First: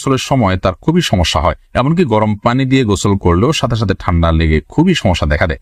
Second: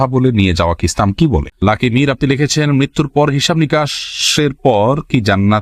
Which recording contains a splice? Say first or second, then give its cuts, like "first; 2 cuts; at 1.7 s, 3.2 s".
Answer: second; 1 cut; at 1.5 s